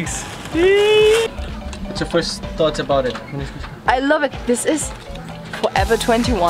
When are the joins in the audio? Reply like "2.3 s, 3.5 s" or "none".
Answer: 1.3 s